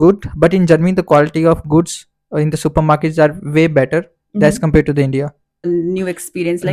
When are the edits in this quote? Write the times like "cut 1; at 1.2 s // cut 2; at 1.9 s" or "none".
cut 1; at 5.7 s